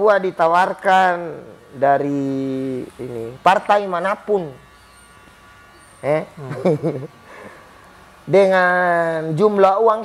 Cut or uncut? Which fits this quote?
uncut